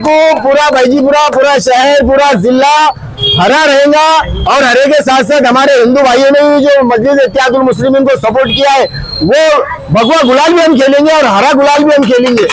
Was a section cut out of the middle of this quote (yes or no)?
no